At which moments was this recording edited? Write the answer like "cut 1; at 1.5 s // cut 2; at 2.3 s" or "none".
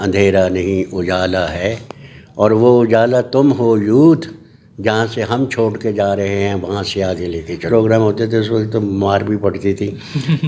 cut 1; at 7.6 s